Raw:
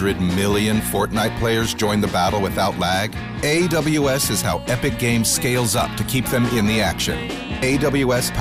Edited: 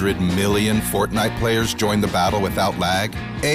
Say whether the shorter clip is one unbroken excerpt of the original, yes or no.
yes